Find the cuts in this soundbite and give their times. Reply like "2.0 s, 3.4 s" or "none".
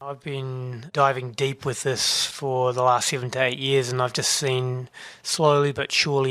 0.9 s